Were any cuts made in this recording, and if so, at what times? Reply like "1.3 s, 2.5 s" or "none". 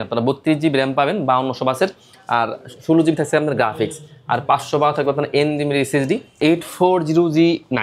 6.3 s